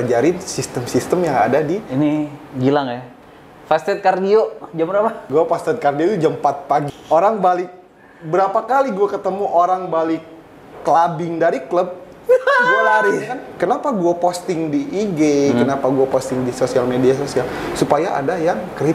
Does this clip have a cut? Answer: yes; 4 cuts; at 1.9 s, 5.2 s, 6.9 s, 13.5 s

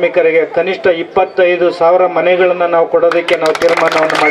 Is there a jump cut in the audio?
no; 0 cuts

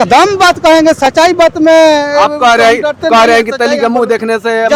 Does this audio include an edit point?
no; 0 cuts

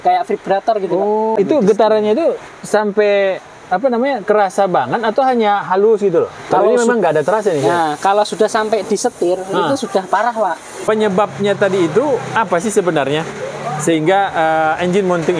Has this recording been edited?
yes; 2 cuts; at 1.4 s, 10.7 s

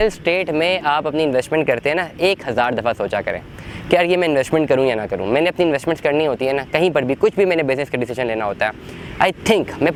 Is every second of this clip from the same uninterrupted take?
yes; 0 cuts

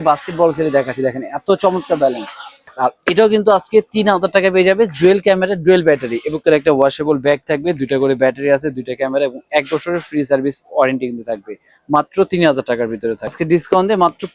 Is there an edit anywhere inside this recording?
yes; 3 cuts; at 2.7 s, 6.4 s, 13.4 s

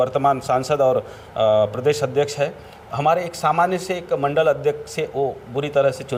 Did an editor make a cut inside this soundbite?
no; 0 cuts

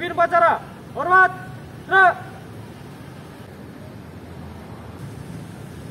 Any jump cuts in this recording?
yes; 2 cuts; at 3.4 s, 5.0 s

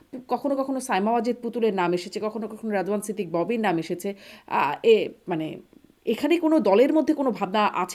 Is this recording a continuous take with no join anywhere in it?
yes; 0 cuts

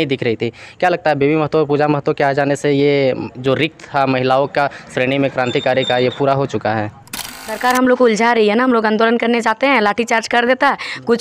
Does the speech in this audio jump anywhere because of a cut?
yes; 1 cut; at 7.6 s

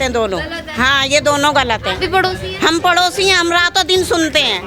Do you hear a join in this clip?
no; 0 cuts

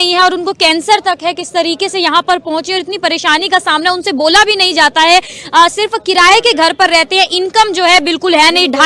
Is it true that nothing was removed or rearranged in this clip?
yes; 0 cuts

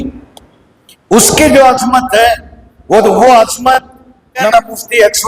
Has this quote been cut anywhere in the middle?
yes; 1 cut; at 4.4 s

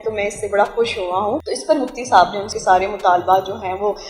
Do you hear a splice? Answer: yes; 2 cuts; at 1.4 s, 2.5 s

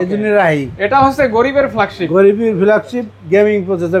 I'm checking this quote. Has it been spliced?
no; 0 cuts

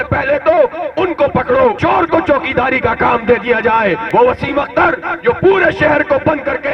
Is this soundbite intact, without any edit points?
no; 2 cuts; at 1.8 s, 4.0 s

